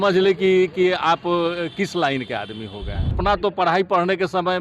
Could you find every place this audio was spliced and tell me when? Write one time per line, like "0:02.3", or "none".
0:03.2